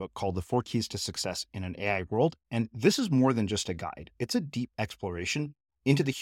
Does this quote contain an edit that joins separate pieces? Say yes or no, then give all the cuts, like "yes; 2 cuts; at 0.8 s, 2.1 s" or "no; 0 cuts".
no; 0 cuts